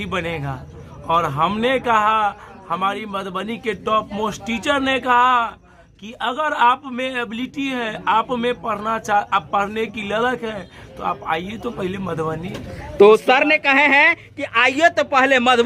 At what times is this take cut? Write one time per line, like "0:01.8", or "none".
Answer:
none